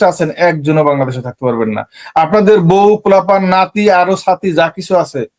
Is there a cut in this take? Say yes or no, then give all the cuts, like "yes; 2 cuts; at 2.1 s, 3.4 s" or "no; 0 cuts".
no; 0 cuts